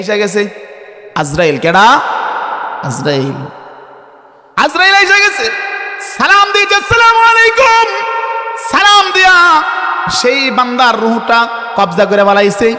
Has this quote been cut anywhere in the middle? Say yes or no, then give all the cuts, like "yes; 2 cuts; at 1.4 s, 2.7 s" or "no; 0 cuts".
no; 0 cuts